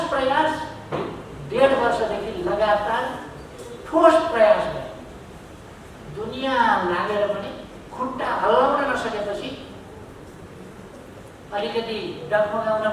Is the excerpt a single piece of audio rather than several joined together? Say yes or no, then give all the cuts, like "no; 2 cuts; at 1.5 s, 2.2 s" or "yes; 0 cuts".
yes; 0 cuts